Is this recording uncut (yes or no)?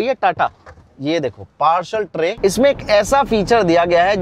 no